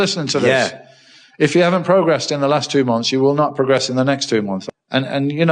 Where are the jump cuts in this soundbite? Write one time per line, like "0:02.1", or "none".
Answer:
0:04.6